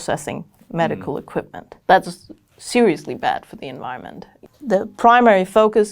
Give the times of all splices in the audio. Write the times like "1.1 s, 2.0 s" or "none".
1.6 s, 4.5 s